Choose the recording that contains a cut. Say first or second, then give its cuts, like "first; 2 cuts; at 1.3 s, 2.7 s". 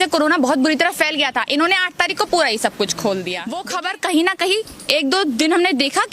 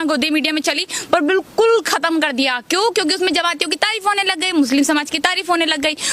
first; 1 cut; at 3.6 s